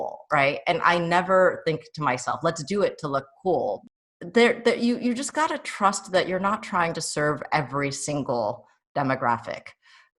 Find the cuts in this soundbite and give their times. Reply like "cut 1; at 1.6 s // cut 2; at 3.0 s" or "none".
cut 1; at 3.8 s